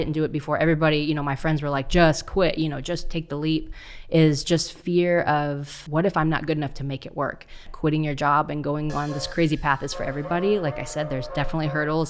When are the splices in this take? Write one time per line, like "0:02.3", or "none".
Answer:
0:05.7
0:07.7

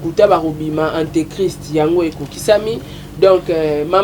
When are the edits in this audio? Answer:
none

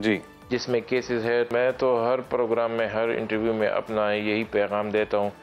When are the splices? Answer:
0:01.5

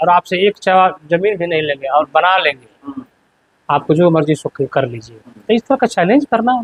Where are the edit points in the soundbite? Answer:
none

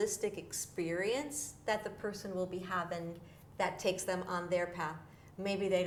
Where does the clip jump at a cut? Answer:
none

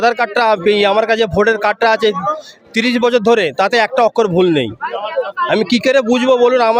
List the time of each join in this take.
none

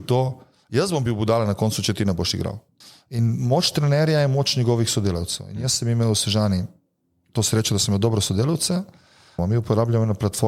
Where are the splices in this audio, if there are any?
0:02.7
0:09.4

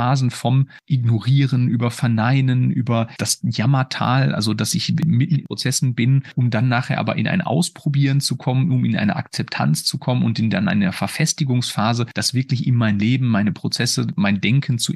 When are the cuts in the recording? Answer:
0:03.2
0:05.0
0:12.2
0:14.1

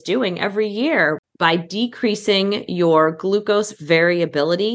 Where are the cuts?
0:01.2

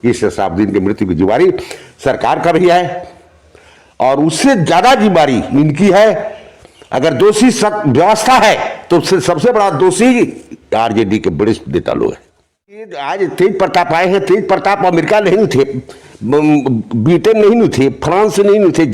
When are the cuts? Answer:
0:12.8

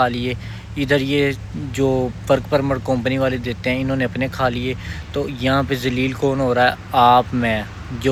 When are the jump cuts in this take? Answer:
none

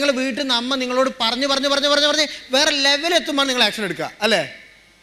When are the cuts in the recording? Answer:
none

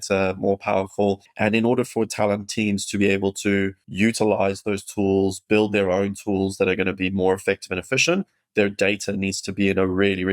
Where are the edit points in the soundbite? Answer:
0:01.3
0:03.8

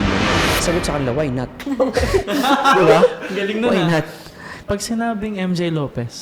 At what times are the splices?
0:04.5

